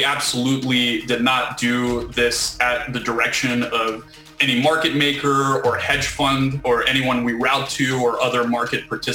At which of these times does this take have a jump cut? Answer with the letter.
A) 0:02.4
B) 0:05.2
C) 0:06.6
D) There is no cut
C